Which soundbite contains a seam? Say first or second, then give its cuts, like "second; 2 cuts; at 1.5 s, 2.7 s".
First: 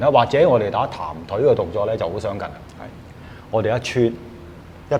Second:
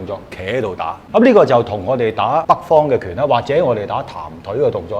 second; 2 cuts; at 1.0 s, 2.2 s